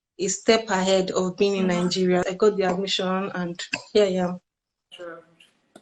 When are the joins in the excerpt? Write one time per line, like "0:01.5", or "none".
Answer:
0:02.3

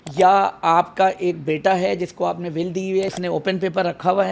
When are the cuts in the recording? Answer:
0:03.2

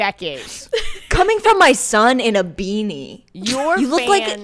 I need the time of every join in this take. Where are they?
0:00.9

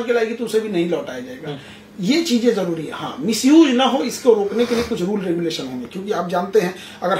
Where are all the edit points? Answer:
none

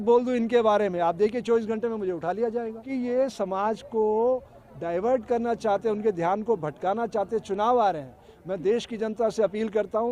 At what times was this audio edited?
0:02.8

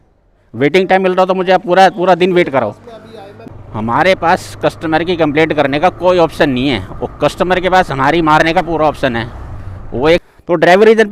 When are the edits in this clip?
0:03.5
0:10.2

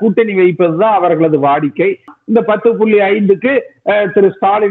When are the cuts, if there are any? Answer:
0:02.1

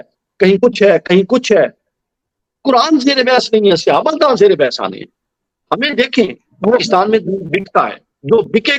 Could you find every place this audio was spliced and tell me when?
none

